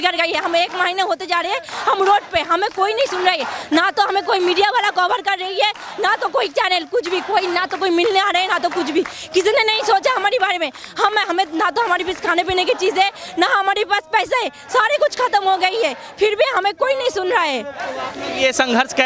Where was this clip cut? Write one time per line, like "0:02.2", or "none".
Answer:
none